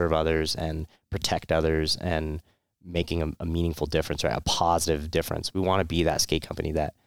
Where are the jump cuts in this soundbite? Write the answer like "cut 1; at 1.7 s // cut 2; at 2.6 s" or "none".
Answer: none